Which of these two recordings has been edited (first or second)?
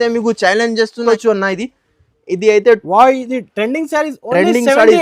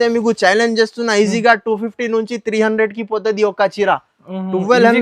first